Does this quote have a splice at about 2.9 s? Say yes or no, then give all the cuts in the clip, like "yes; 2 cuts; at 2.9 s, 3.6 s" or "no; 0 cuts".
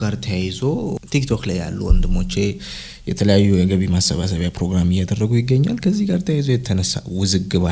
no; 1 cut; at 1.0 s